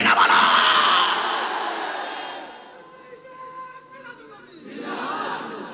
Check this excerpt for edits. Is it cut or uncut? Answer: cut